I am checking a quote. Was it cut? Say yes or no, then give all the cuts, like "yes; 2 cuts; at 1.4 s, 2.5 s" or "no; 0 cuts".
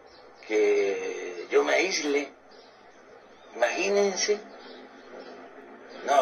no; 0 cuts